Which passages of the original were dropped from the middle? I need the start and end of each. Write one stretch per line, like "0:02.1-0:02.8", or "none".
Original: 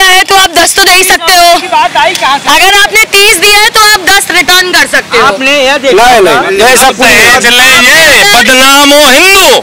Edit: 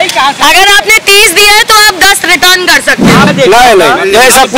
0:05.3-0:05.7

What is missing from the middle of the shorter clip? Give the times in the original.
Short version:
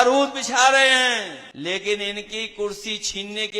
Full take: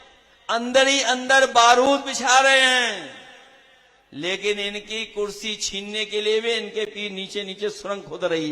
0:03.1-0:04.0

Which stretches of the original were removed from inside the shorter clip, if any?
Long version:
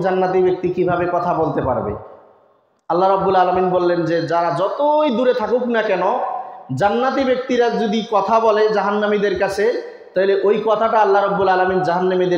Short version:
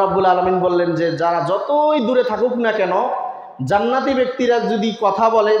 none

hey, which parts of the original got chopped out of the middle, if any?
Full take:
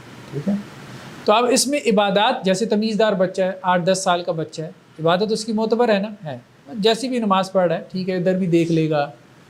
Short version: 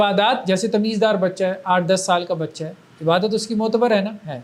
none

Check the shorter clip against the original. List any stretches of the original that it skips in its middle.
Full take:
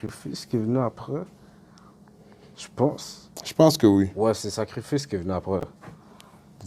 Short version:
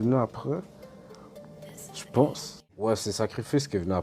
0:03.6-0:04.3

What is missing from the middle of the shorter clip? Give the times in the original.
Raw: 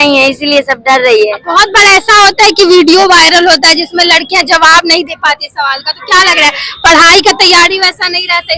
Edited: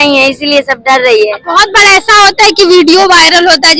none

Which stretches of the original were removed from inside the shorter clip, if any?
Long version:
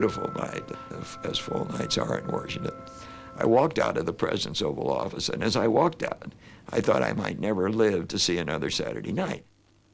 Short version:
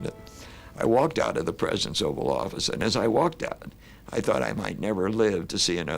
none

